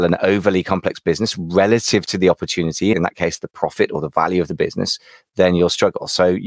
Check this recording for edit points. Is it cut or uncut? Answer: cut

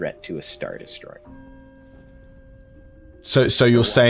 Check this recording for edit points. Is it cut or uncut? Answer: uncut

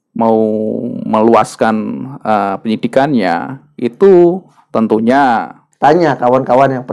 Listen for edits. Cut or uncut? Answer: cut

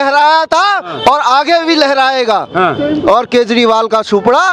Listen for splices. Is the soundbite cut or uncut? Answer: uncut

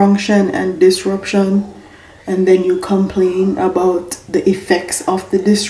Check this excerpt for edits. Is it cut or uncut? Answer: uncut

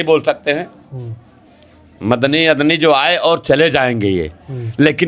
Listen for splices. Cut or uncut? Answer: uncut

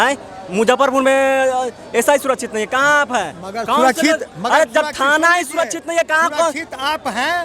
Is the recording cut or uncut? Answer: uncut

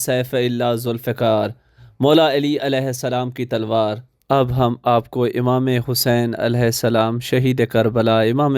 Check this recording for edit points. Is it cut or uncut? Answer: cut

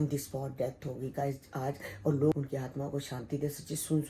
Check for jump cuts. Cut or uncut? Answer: cut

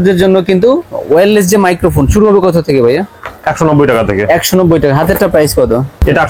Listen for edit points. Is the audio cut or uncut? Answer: uncut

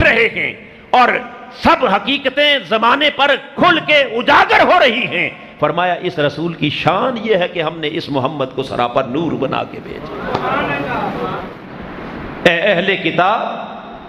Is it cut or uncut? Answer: cut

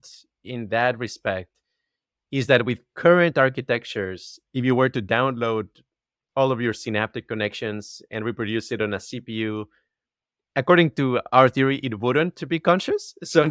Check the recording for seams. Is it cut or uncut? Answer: uncut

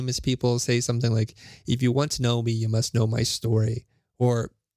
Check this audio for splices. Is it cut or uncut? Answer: uncut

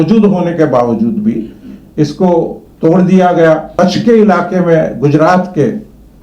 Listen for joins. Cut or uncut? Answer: cut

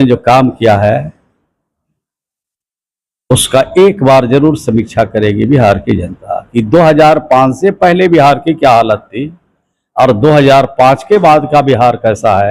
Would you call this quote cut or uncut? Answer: uncut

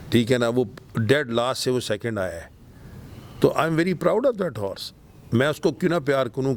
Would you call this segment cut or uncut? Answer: uncut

